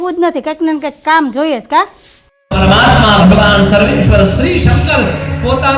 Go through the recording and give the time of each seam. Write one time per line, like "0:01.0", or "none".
0:02.4